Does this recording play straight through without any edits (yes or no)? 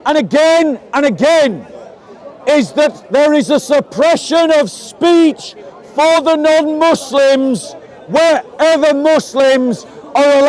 yes